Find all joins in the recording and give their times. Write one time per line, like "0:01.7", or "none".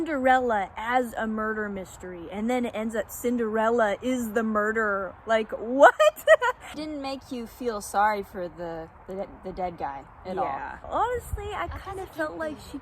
0:06.8
0:10.8